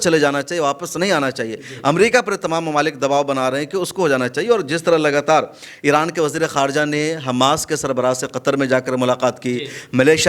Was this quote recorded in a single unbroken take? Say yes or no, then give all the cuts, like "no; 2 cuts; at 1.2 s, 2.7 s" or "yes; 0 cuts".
yes; 0 cuts